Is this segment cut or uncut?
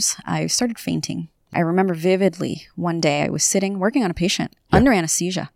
uncut